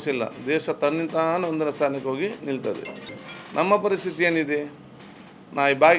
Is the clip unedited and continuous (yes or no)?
no